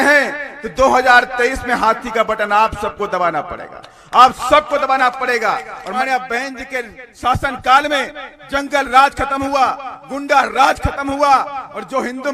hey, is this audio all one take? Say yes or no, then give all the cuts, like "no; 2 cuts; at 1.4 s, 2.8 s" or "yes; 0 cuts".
no; 1 cut; at 5.8 s